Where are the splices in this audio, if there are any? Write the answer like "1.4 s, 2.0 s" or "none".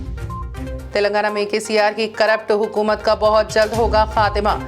0.9 s